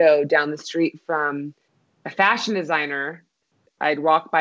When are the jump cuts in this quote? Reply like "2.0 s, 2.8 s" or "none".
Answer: 3.5 s